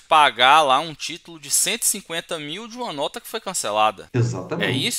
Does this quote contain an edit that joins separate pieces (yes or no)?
yes